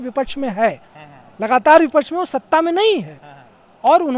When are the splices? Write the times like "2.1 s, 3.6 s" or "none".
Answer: none